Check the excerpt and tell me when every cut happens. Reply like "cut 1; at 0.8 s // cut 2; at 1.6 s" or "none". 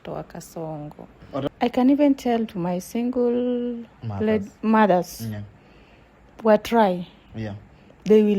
cut 1; at 1.5 s